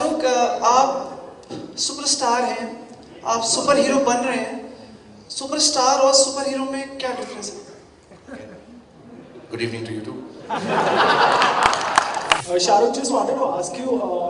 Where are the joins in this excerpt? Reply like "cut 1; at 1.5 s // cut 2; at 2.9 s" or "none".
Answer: cut 1; at 12.4 s